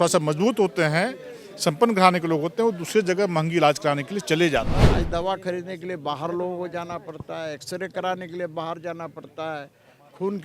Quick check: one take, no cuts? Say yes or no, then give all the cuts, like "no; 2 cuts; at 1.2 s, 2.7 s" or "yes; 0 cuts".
no; 1 cut; at 4.8 s